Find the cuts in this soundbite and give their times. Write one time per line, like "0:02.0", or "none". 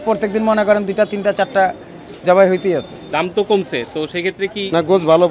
0:03.0